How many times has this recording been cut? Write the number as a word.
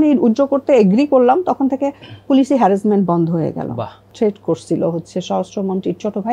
one